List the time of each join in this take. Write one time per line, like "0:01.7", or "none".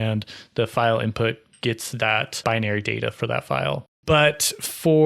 0:02.4
0:03.9